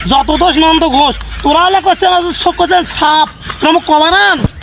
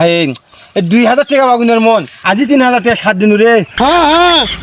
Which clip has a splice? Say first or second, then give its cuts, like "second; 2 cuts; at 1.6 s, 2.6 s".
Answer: second; 1 cut; at 3.7 s